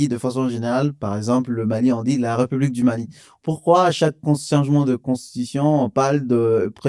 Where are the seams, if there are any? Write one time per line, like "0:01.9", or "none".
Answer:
none